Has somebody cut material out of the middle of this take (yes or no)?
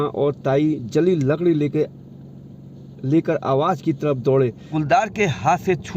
yes